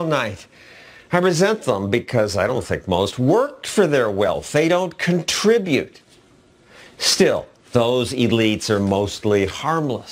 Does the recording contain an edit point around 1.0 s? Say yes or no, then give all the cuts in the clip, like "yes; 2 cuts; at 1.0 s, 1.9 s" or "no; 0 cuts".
no; 1 cut; at 9.1 s